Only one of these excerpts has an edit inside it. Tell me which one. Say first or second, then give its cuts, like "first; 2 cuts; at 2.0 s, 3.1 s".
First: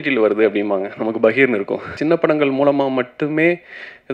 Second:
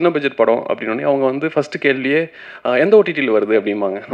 first; 1 cut; at 2.0 s